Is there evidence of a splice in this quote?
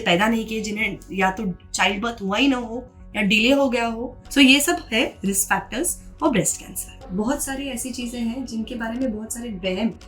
yes; 2 cuts; at 4.1 s, 6.9 s

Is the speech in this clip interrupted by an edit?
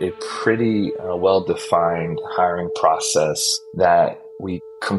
no; 0 cuts

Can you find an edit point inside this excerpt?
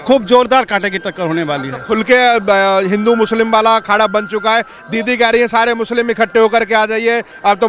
no; 0 cuts

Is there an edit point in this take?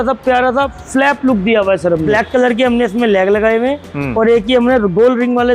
yes; 1 cut; at 2.1 s

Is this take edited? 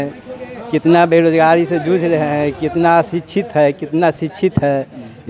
no; 0 cuts

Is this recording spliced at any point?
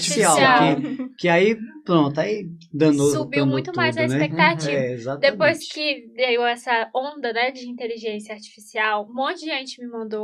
no; 0 cuts

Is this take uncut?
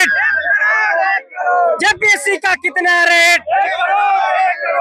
yes; 0 cuts

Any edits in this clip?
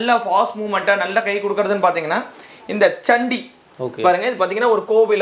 no; 0 cuts

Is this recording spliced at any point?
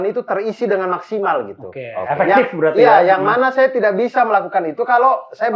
no; 0 cuts

